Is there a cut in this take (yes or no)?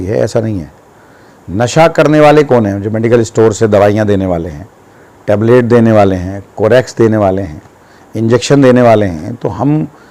no